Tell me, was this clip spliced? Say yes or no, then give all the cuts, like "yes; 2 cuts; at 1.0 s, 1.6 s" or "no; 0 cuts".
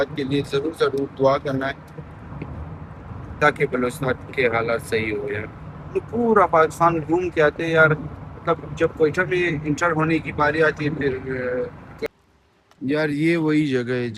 yes; 1 cut; at 12.1 s